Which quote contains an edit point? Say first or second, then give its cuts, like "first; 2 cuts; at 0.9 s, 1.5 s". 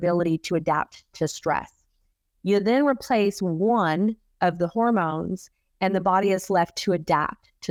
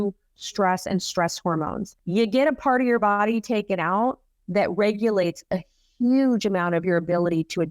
second; 1 cut; at 1.9 s